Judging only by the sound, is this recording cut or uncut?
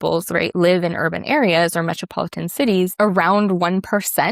cut